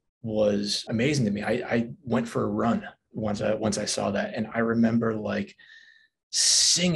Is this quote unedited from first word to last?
yes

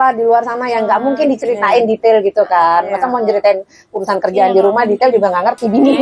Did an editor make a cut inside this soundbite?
no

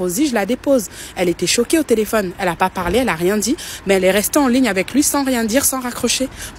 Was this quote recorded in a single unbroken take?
no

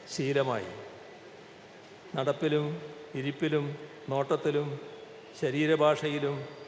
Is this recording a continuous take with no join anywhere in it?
yes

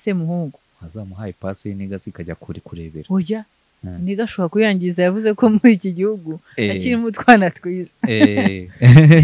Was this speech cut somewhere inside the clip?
no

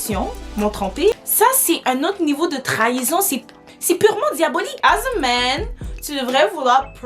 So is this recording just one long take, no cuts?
no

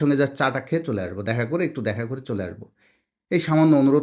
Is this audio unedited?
yes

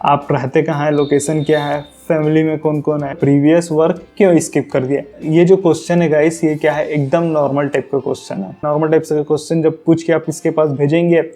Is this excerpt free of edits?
no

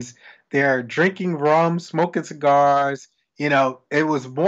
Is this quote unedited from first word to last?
yes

